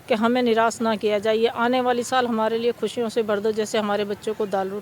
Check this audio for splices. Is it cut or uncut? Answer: cut